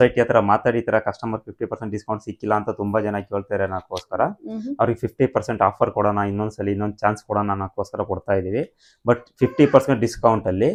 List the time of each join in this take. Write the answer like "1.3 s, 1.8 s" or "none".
none